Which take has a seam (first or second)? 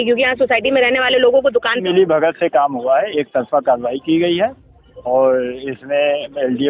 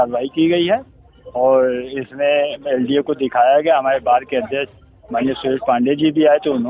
first